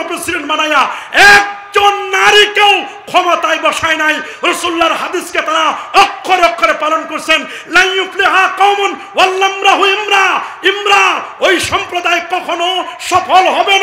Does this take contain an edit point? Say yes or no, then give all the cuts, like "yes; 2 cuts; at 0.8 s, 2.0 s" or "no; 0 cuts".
no; 0 cuts